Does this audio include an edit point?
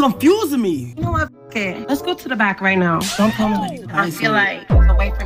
yes; 1 cut; at 3.8 s

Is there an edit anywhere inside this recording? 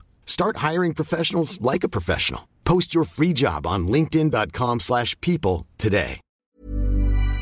yes; 1 cut; at 6.2 s

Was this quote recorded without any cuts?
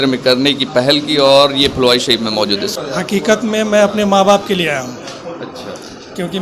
no; 1 cut; at 2.7 s

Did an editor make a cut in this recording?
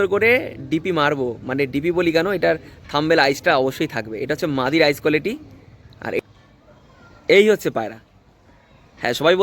yes; 1 cut; at 6.2 s

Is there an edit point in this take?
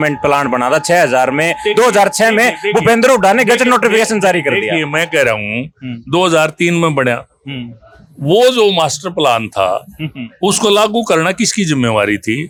no; 0 cuts

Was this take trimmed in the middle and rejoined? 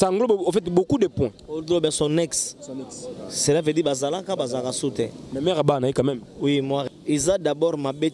yes; 1 cut; at 6.9 s

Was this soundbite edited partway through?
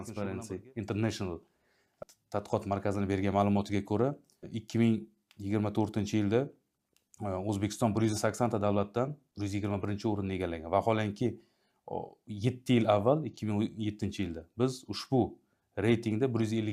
no; 0 cuts

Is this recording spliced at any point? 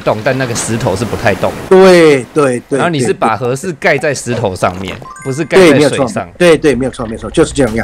no; 0 cuts

